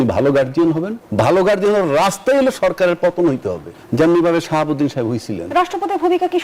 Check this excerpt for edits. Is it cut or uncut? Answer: cut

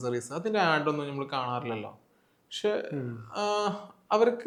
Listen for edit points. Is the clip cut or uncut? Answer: uncut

